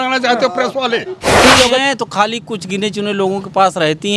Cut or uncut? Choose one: cut